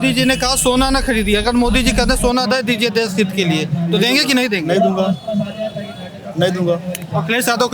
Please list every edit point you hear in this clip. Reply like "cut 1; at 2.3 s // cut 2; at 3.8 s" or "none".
none